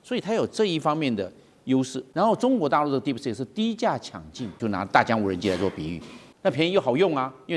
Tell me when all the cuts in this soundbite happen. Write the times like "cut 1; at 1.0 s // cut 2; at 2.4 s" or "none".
cut 1; at 2.0 s // cut 2; at 4.6 s // cut 3; at 6.2 s